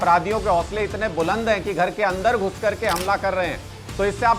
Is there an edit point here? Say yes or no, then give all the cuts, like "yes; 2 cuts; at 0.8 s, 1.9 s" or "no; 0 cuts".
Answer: no; 0 cuts